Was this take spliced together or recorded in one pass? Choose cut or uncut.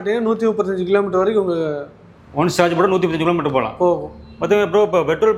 uncut